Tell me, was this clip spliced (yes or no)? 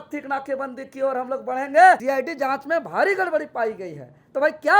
yes